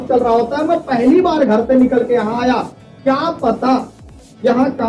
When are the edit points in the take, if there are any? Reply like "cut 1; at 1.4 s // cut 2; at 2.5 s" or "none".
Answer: none